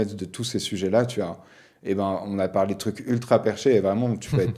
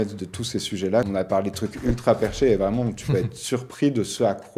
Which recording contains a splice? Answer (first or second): second